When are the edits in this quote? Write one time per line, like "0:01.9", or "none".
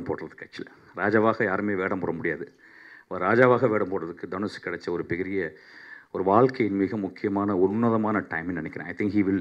none